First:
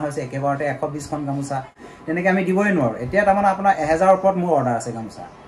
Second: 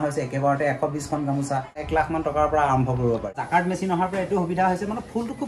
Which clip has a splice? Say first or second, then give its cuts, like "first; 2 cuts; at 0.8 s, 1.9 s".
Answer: second; 2 cuts; at 1.8 s, 3.4 s